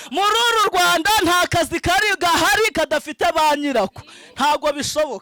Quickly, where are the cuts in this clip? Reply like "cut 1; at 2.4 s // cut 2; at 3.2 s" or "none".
none